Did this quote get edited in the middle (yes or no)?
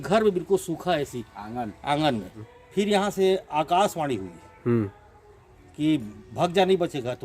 yes